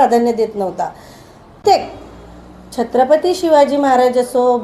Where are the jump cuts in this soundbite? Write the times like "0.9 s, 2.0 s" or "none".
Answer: 1.6 s